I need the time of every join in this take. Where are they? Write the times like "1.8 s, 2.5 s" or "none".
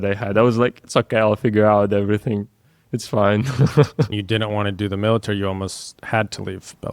4.1 s